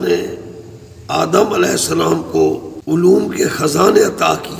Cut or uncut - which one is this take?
cut